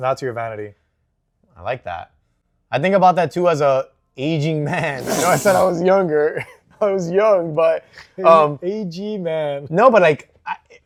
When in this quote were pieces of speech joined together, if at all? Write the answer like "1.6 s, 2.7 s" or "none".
none